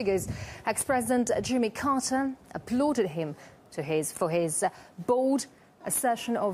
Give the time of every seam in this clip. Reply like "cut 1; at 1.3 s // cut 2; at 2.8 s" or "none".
none

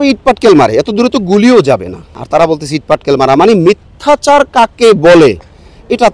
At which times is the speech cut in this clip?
cut 1; at 2.2 s

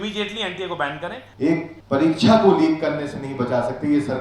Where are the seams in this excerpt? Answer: cut 1; at 1.5 s

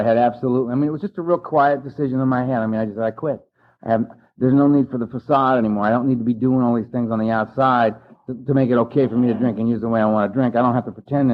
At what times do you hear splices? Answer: none

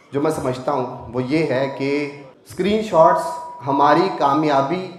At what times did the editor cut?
none

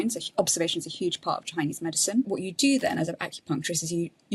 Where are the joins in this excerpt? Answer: cut 1; at 2.3 s

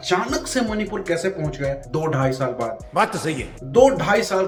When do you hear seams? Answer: none

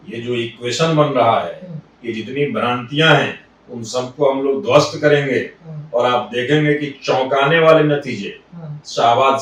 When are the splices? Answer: none

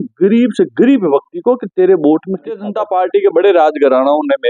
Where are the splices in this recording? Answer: cut 1; at 2.7 s

